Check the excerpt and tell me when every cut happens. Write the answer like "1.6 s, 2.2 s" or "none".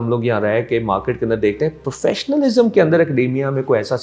none